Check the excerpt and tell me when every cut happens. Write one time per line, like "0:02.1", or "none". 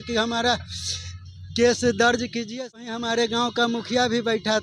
0:02.8